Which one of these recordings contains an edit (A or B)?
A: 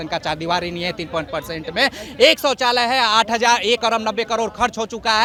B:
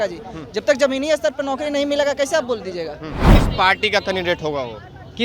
B